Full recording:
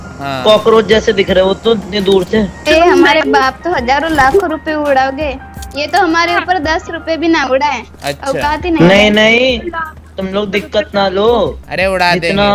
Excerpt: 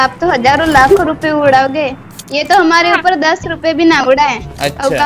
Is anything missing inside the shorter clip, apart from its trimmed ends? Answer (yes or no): no